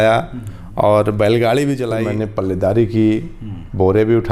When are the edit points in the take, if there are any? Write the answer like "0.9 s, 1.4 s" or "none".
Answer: 2.0 s